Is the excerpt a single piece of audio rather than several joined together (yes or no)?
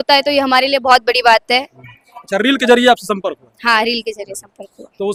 yes